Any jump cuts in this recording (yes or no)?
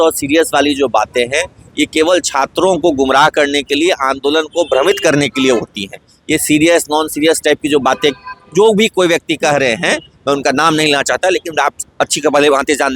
no